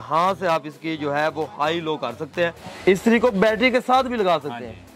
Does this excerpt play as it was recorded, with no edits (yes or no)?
no